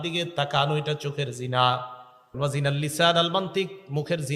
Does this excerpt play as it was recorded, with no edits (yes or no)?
no